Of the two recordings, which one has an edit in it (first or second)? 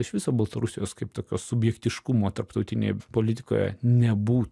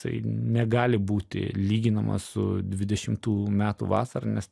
first